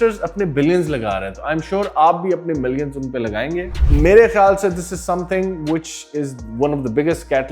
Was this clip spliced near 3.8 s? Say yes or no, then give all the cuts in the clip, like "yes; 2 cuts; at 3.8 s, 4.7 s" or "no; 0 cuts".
yes; 1 cut; at 3.8 s